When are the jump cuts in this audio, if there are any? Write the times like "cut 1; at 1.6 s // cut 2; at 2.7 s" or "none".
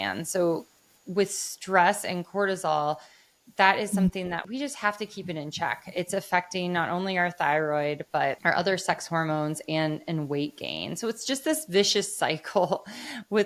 cut 1; at 4.4 s // cut 2; at 8.4 s